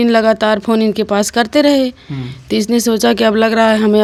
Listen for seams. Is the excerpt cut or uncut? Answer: uncut